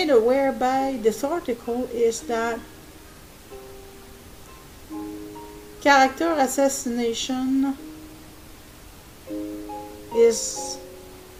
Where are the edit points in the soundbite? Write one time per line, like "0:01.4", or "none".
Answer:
none